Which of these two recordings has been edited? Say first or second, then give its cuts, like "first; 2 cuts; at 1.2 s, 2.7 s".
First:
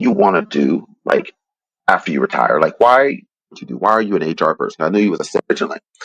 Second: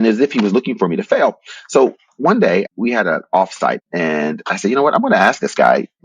second; 2 cuts; at 2.7 s, 3.8 s